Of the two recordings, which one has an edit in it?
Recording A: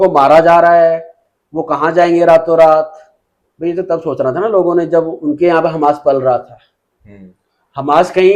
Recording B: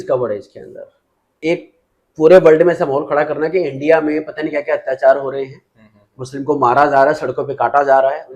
B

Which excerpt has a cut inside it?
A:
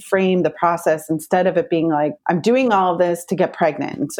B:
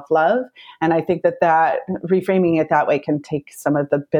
A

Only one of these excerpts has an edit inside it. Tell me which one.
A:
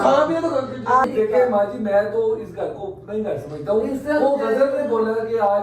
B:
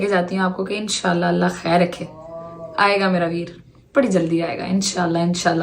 A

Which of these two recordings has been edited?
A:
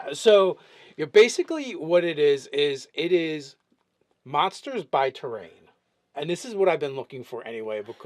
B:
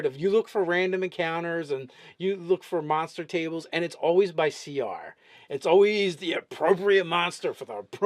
A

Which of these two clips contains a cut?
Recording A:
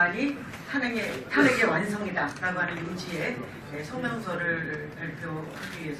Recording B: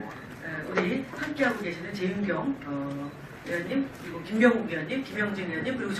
B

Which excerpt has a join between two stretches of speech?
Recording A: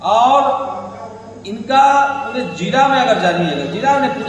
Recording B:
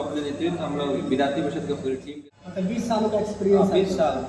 B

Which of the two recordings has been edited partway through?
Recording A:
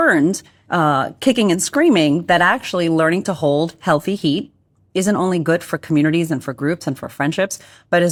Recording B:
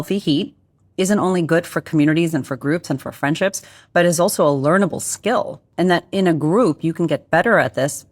B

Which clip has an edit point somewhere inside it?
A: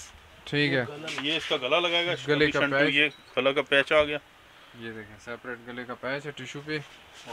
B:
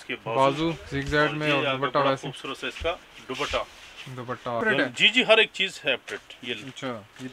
B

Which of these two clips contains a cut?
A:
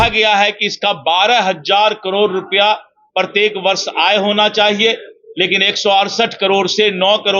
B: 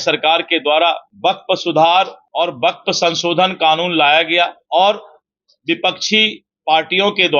B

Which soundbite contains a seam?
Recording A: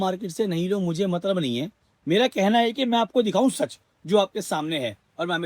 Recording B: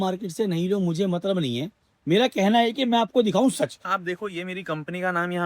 B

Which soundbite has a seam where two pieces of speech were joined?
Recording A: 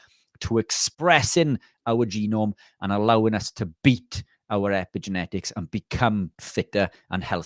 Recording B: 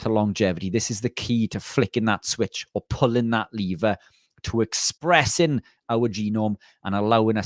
A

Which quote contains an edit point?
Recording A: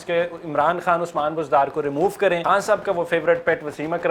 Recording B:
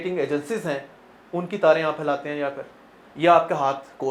A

